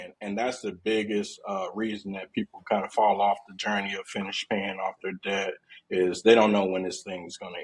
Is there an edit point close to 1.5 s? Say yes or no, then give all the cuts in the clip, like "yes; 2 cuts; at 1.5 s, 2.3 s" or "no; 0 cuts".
no; 0 cuts